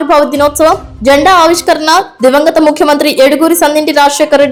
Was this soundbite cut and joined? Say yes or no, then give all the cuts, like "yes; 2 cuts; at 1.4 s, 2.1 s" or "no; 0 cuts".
no; 0 cuts